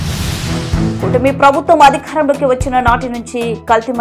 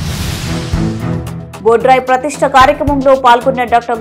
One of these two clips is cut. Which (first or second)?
second